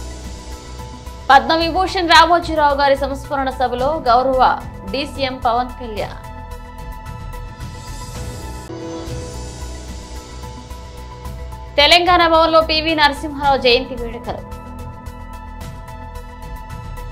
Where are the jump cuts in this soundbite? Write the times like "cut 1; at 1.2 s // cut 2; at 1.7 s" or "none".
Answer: none